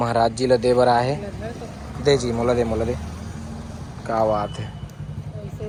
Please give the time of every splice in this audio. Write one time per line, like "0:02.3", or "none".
none